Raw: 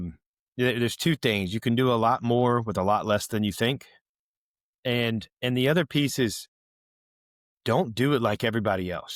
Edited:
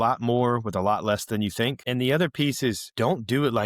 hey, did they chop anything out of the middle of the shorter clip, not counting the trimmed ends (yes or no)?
yes